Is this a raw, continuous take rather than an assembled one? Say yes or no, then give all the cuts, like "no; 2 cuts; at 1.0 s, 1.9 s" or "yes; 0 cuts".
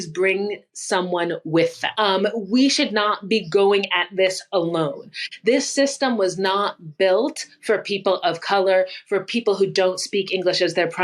no; 1 cut; at 1.9 s